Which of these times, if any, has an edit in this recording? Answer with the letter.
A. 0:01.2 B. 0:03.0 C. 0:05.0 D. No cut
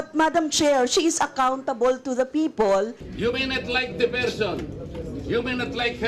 B